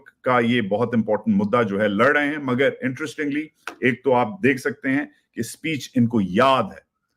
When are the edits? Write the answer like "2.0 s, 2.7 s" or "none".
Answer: none